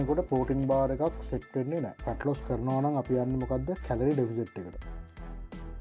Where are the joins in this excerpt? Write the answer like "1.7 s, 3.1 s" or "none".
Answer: 2.0 s